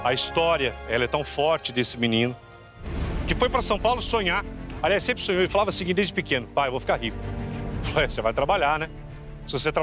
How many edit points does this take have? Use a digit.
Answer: 0